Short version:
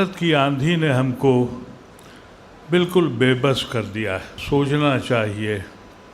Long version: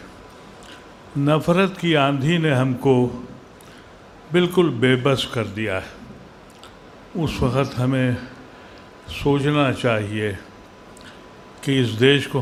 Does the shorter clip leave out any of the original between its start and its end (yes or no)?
yes